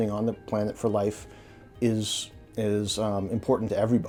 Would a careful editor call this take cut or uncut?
uncut